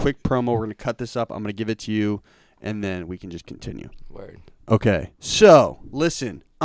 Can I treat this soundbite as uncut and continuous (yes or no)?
yes